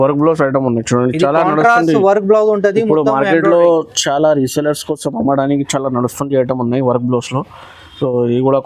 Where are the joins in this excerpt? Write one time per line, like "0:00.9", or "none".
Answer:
none